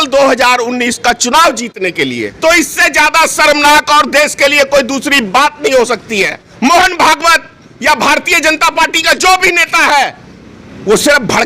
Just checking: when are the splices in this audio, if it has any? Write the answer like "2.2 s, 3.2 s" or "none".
2.3 s, 6.4 s